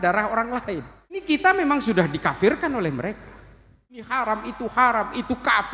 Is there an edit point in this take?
yes; 2 cuts; at 1.4 s, 4.1 s

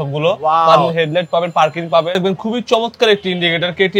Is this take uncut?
no; 2 cuts; at 0.9 s, 2.1 s

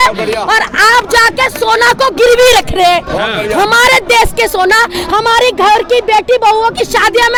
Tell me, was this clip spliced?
no; 0 cuts

